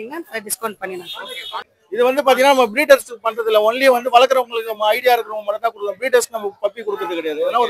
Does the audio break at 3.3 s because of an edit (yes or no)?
no